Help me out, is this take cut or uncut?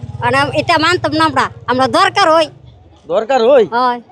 uncut